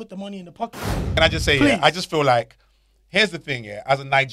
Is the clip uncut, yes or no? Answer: no